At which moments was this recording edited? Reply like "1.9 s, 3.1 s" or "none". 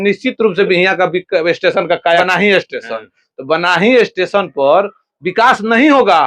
2.2 s